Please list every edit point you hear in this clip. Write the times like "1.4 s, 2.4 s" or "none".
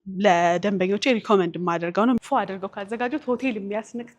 2.2 s